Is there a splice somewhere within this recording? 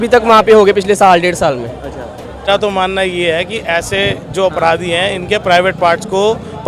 yes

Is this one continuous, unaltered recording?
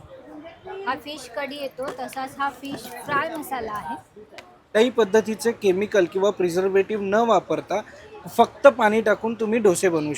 no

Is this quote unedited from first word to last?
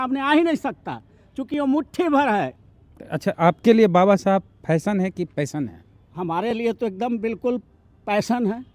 no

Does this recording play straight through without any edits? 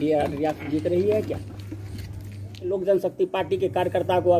no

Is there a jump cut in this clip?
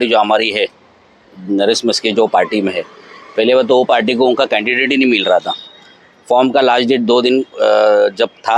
no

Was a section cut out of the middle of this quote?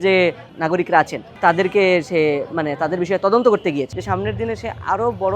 yes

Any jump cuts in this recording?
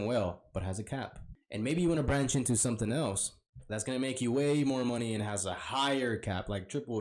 yes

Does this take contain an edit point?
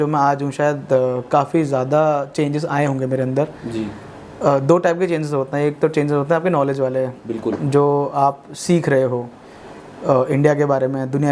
no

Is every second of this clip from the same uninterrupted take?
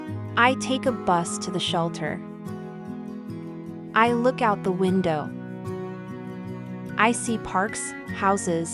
no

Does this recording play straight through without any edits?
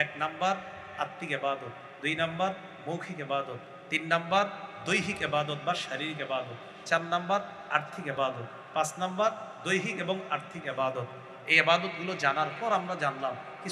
yes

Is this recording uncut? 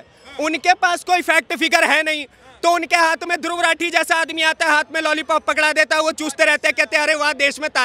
yes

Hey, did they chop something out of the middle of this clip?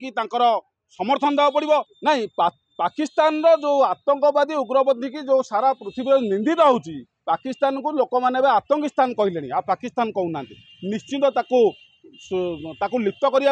yes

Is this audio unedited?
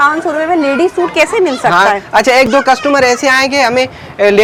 yes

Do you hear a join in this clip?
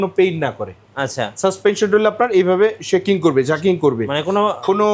no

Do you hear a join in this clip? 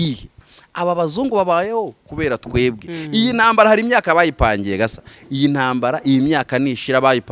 no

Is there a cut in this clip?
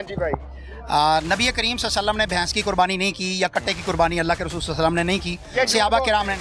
no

